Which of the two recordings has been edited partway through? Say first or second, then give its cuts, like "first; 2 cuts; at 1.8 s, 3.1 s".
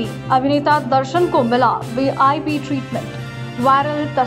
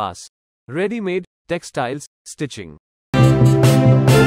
second; 1 cut; at 3.1 s